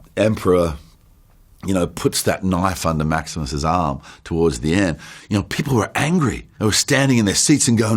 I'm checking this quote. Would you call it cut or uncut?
uncut